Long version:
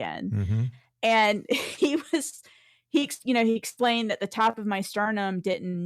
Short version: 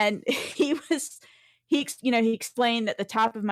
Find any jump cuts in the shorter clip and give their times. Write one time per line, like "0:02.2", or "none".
none